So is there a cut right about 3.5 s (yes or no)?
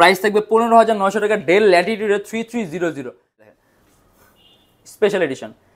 yes